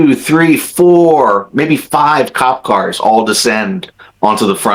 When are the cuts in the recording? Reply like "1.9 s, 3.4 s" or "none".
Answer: none